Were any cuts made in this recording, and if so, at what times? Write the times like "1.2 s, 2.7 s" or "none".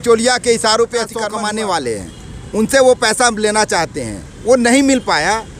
1.2 s